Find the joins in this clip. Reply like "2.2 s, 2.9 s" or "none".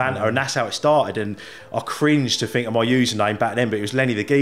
none